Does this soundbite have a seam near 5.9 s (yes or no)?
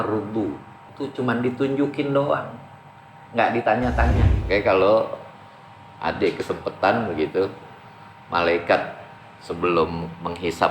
no